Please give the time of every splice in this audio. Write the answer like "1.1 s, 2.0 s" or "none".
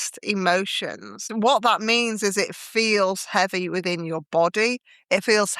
1.3 s